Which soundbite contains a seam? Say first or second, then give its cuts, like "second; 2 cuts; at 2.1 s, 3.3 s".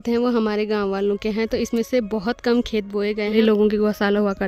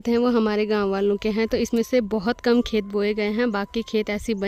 first; 1 cut; at 3.4 s